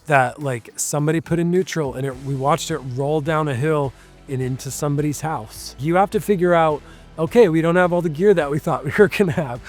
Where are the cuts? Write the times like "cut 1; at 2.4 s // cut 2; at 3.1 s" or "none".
cut 1; at 5.8 s